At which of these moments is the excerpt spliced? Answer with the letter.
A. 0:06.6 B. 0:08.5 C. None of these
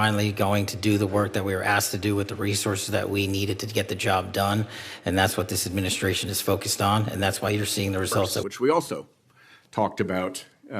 B